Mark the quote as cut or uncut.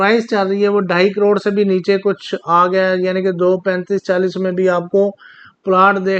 uncut